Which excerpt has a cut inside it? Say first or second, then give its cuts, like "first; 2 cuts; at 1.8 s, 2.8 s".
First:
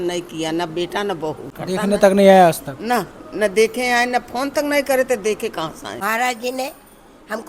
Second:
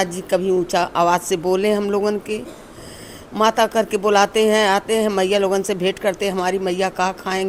first; 2 cuts; at 1.5 s, 6.0 s